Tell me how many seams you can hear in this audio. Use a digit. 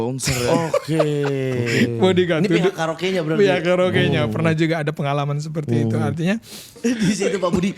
1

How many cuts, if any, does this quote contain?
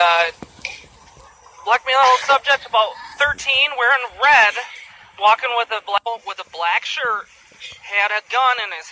1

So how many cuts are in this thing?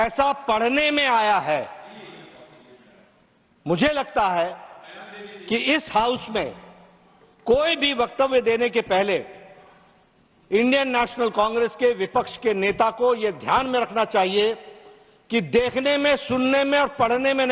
0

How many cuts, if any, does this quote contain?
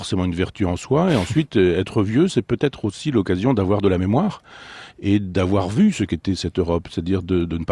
0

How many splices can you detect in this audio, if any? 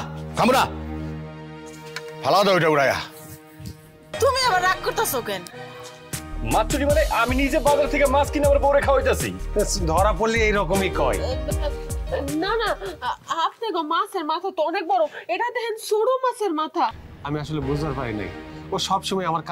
2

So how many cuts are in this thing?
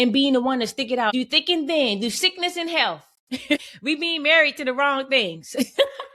2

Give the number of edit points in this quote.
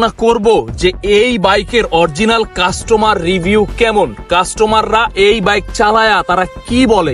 0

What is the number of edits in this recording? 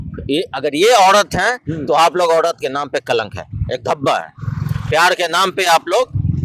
0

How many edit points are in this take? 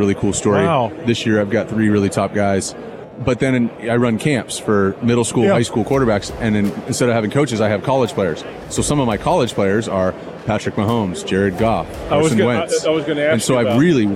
2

